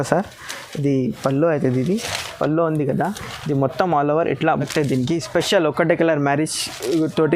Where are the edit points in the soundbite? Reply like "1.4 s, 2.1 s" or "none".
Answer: 4.7 s